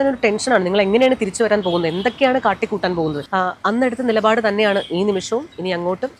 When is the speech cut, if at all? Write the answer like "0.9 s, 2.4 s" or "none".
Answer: 3.2 s

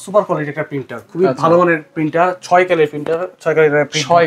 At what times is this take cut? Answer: none

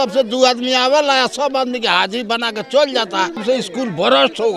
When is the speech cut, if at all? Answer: 3.4 s

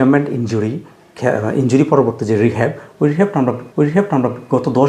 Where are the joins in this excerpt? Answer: none

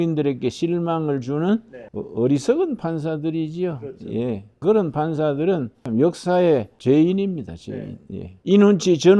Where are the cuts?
4.6 s

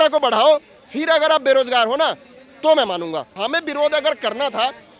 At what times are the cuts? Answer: 3.4 s

